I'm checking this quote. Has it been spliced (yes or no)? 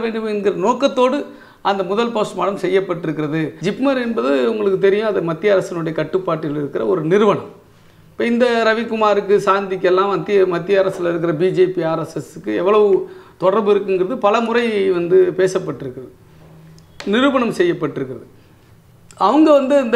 yes